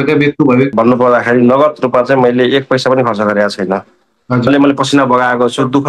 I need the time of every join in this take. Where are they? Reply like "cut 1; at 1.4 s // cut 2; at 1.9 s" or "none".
cut 1; at 0.7 s // cut 2; at 4.5 s